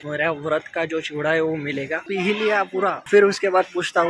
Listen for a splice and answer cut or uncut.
cut